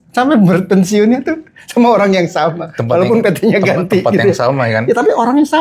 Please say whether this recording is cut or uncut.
uncut